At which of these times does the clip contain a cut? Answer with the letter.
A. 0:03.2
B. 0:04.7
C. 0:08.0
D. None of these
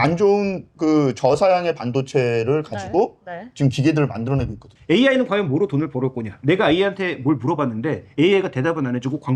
B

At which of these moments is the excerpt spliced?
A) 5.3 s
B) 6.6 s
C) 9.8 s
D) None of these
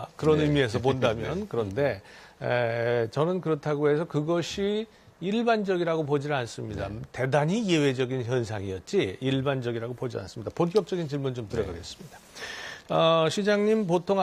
D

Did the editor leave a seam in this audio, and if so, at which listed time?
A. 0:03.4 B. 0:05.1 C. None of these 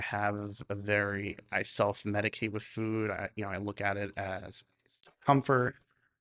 B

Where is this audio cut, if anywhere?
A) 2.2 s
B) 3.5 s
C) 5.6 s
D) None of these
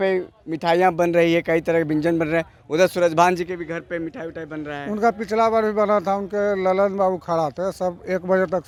D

